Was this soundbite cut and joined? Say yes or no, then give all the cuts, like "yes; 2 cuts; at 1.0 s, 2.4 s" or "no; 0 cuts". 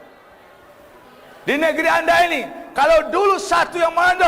yes; 1 cut; at 1.0 s